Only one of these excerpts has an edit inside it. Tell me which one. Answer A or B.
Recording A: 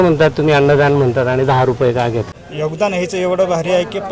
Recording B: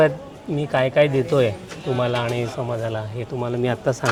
A